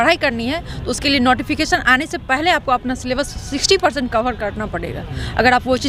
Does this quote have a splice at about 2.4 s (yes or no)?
no